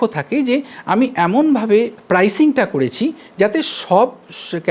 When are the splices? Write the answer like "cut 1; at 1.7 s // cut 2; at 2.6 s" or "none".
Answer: cut 1; at 2.0 s

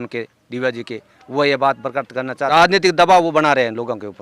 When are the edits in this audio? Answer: cut 1; at 2.5 s

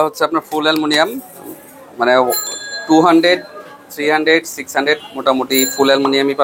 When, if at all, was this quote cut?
none

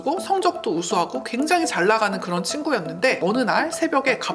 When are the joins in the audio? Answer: cut 1; at 3.2 s

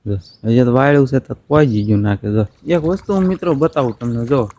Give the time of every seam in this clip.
cut 1; at 2.6 s

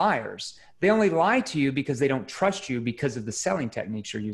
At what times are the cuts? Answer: none

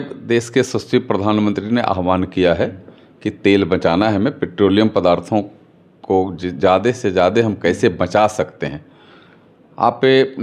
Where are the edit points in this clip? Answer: none

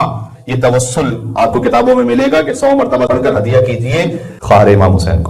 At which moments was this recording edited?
cut 1; at 3.1 s // cut 2; at 4.3 s

